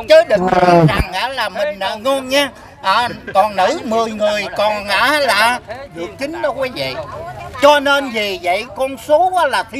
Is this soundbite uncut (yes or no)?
yes